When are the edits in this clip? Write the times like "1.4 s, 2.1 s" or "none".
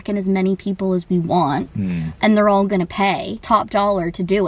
3.3 s